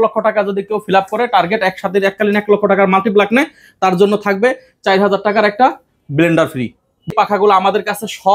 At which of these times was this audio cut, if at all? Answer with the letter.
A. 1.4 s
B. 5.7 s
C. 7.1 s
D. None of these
C